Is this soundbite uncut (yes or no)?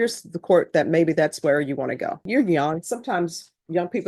no